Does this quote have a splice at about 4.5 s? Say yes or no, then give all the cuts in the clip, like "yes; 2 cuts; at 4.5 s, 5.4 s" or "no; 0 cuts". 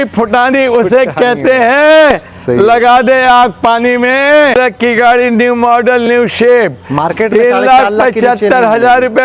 yes; 1 cut; at 4.5 s